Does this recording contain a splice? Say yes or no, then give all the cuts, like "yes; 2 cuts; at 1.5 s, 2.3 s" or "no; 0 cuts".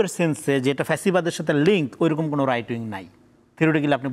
no; 0 cuts